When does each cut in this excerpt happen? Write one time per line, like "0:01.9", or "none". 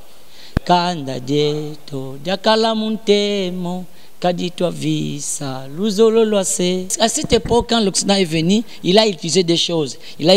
0:06.9